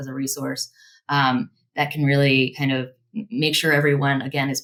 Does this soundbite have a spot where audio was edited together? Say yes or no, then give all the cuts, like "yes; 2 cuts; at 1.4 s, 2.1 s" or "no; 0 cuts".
no; 0 cuts